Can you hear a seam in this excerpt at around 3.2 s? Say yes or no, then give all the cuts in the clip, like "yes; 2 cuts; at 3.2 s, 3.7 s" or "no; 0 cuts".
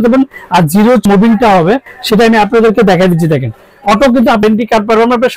no; 2 cuts; at 1.1 s, 4.4 s